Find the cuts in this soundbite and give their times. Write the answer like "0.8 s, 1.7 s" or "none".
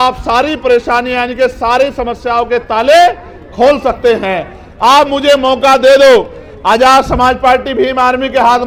none